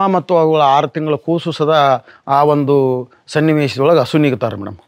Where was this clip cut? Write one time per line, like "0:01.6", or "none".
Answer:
none